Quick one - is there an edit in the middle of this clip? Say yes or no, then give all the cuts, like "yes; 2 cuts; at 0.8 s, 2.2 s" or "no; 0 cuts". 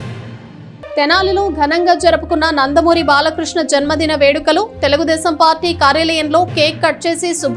no; 0 cuts